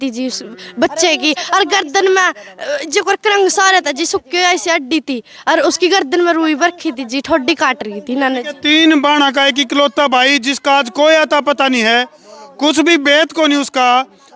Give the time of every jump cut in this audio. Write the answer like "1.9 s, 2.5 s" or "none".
none